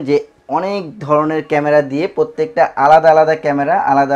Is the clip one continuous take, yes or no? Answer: yes